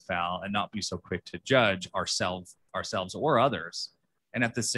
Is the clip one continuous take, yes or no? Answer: yes